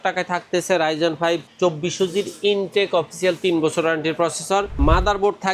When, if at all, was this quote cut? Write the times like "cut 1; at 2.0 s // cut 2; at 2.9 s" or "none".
cut 1; at 1.5 s // cut 2; at 4.7 s